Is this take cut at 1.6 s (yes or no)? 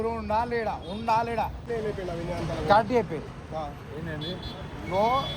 yes